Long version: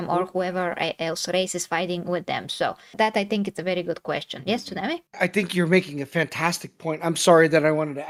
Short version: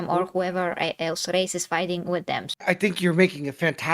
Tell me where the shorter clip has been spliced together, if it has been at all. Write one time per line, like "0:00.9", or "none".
0:02.5